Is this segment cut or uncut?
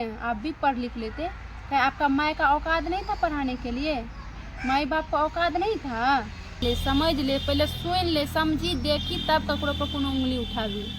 cut